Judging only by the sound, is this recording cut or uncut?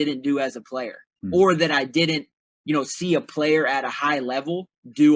uncut